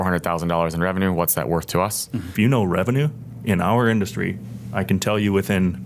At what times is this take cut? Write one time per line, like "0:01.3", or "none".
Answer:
0:02.3